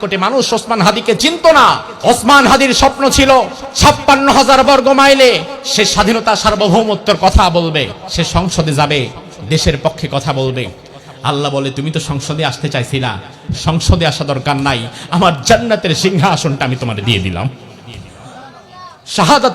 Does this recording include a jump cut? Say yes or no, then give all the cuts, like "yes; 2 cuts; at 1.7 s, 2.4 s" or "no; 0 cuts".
yes; 4 cuts; at 1.9 s, 3.6 s, 5.6 s, 8.0 s